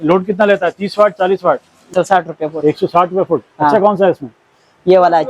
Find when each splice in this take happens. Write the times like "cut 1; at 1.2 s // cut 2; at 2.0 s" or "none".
cut 1; at 1.9 s